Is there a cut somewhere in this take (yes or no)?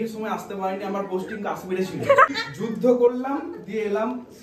yes